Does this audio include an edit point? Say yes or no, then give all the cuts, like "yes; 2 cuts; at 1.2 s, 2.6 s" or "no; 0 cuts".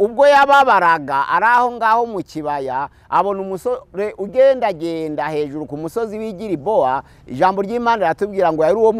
no; 0 cuts